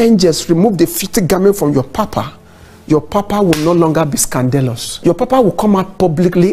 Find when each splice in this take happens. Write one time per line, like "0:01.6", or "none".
0:04.9